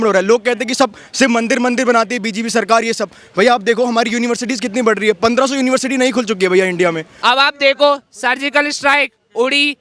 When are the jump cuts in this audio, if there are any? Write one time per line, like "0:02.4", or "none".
0:07.1